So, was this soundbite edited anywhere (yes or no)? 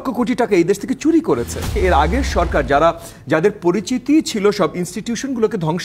yes